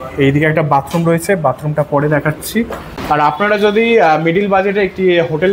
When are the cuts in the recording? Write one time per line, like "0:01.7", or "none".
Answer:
0:02.9